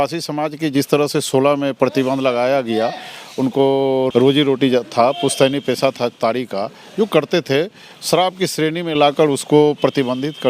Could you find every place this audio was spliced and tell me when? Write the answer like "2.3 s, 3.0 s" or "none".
4.1 s